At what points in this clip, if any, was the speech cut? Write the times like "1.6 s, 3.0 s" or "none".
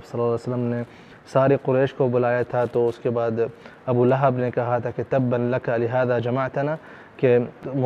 none

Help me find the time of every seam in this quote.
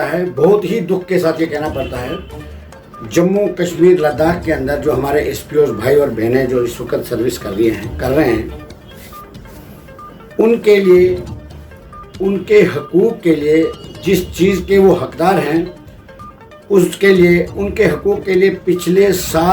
none

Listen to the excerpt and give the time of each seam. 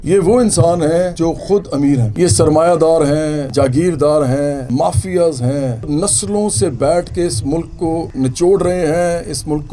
1.1 s, 2.1 s, 3.4 s, 4.6 s, 5.9 s, 8.1 s

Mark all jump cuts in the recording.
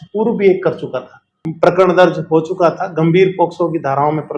1.4 s

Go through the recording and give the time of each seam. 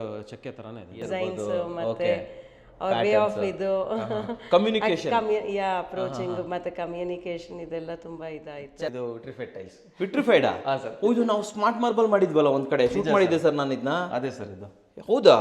1.0 s, 8.9 s

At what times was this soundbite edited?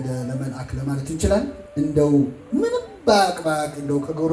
1.6 s

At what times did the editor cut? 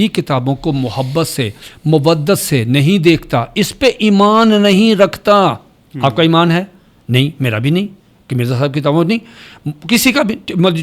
none

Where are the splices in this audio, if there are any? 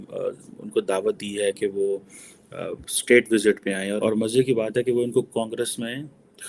4.0 s

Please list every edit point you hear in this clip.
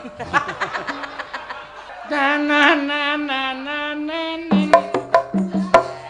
1.8 s

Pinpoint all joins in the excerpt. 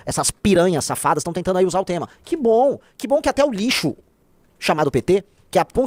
none

